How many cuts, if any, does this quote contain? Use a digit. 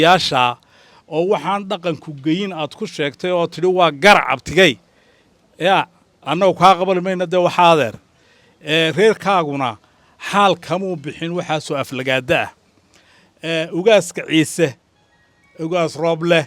0